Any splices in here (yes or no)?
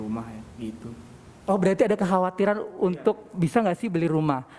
no